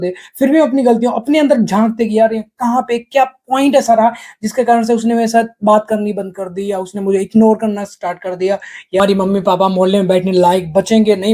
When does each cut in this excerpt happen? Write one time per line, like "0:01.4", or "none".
0:09.0